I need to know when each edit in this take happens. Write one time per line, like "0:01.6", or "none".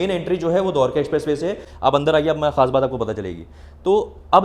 0:01.7